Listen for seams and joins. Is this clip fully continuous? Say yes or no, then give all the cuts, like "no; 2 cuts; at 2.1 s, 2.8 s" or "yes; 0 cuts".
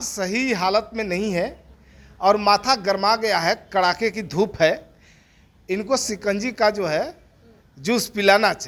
yes; 0 cuts